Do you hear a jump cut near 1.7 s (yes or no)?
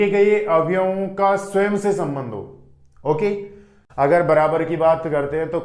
no